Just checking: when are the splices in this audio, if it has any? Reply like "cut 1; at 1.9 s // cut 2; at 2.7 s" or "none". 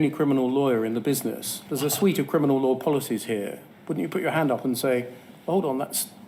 none